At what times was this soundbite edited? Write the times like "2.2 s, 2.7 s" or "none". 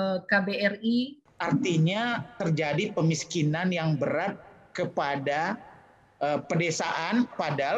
1.2 s